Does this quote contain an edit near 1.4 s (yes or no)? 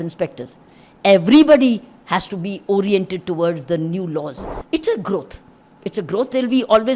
no